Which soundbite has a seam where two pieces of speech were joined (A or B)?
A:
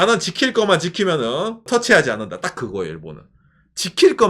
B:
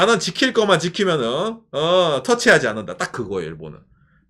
A